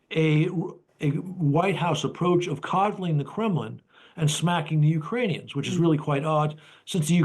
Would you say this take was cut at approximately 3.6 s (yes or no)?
no